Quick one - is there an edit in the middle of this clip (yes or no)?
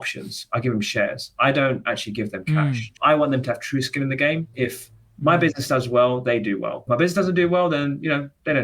yes